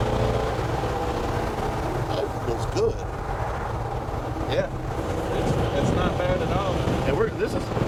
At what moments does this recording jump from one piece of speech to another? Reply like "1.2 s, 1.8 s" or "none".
none